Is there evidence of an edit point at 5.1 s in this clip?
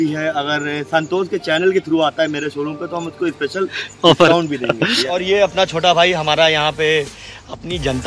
yes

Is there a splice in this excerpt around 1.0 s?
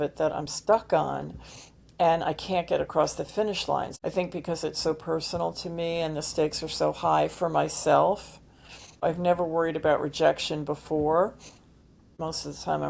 no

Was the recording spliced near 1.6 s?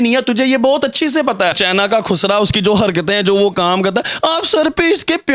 yes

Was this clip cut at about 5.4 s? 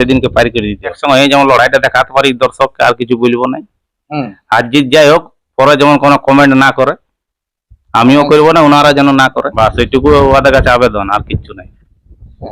no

